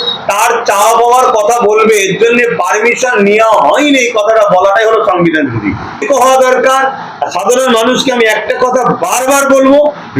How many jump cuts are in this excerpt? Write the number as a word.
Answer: one